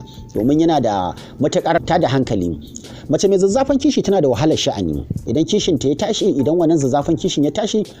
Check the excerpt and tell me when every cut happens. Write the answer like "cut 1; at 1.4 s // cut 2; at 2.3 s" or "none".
cut 1; at 1.8 s // cut 2; at 5.1 s